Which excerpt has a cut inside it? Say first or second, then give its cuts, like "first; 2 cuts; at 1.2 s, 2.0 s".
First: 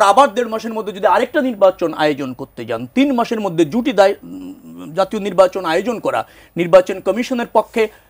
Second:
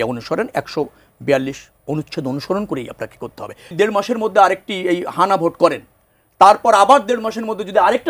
second; 1 cut; at 3.7 s